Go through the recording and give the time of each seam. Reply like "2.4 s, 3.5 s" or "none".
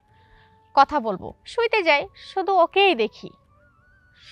1.4 s

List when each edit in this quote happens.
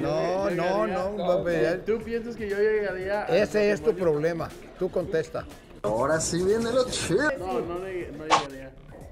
5.7 s, 7.3 s

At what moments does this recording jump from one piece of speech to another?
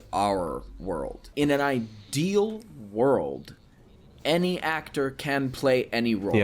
1.3 s

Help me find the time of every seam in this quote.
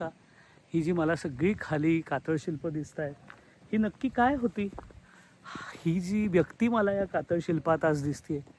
none

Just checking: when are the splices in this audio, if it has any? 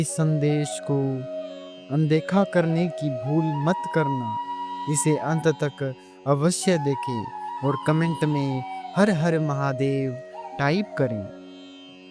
11.2 s

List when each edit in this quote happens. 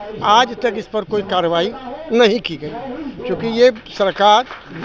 none

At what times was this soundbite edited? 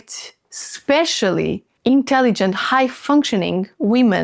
1.7 s

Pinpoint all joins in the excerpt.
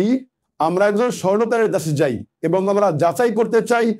none

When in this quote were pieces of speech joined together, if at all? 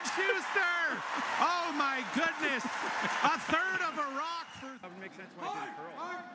none

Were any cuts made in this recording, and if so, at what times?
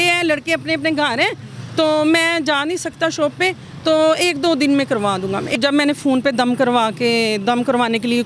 5.6 s

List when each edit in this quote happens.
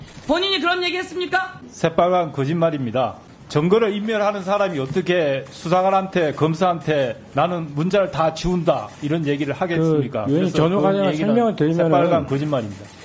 1.6 s, 3.3 s

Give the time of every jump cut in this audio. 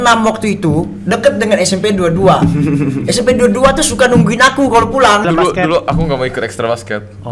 5.2 s

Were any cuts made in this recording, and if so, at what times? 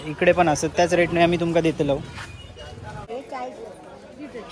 3.0 s

